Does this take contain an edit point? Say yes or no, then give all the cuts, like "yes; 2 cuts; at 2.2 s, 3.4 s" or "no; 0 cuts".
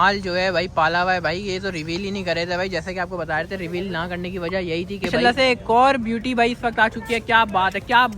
yes; 1 cut; at 5.1 s